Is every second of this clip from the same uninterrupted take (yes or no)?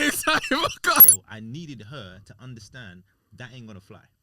no